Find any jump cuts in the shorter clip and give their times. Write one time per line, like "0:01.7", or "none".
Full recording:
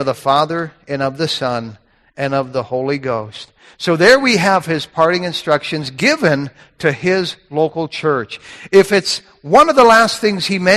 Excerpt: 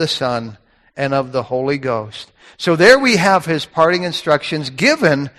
none